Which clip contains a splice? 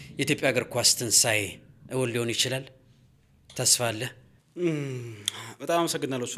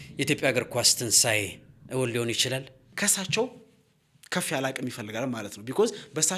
second; 1 cut; at 2.9 s

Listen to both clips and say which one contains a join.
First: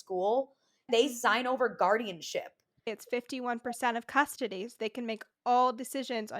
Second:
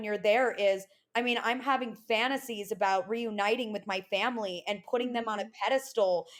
first; 2 cuts; at 0.9 s, 2.9 s

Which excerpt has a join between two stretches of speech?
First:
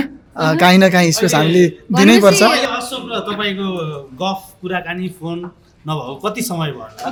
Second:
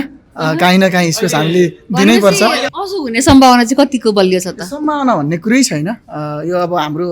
second; 1 cut; at 2.8 s

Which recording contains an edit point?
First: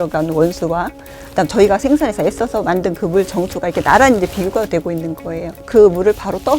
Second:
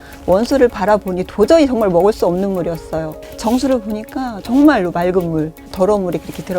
first; 1 cut; at 5.5 s

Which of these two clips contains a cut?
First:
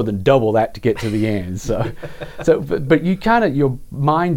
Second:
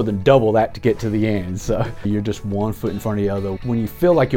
second; 2 cuts; at 2.1 s, 3.6 s

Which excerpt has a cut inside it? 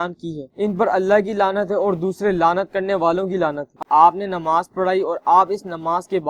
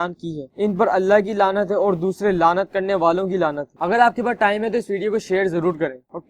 first; 1 cut; at 3.7 s

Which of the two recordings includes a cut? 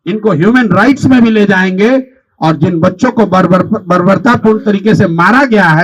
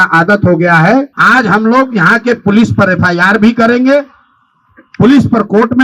second; 1 cut; at 1.2 s

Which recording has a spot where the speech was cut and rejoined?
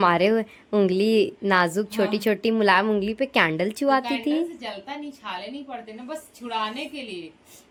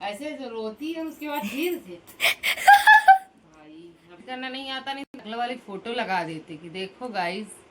second; 1 cut; at 4.2 s

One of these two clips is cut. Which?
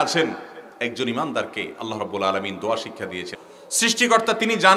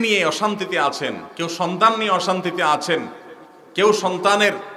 first; 1 cut; at 3.3 s

